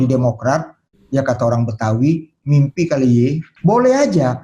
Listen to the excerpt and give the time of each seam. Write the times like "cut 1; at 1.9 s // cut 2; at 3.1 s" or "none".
cut 1; at 3.5 s

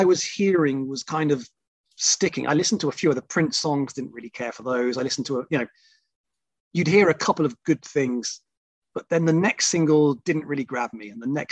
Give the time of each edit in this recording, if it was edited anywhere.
none

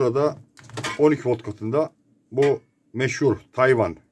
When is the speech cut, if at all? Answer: none

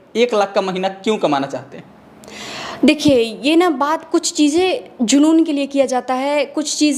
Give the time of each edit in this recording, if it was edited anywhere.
none

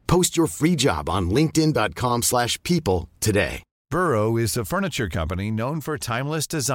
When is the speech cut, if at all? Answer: cut 1; at 3.8 s

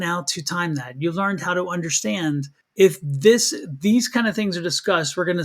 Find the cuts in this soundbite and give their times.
cut 1; at 2.6 s

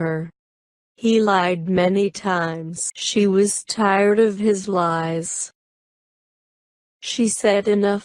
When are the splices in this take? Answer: none

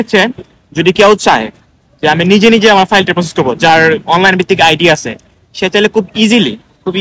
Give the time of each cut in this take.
none

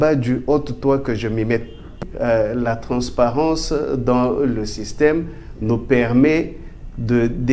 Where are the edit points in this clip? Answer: cut 1; at 2.0 s

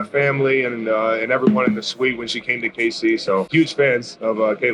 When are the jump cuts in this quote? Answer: none

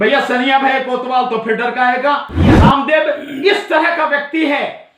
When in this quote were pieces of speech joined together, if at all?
cut 1; at 2.5 s

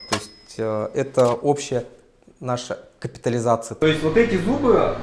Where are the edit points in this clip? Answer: cut 1; at 3.8 s

